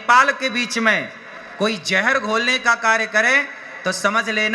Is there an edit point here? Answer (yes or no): no